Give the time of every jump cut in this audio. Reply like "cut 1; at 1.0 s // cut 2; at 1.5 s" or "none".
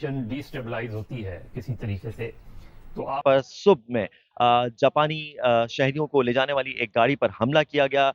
cut 1; at 3.2 s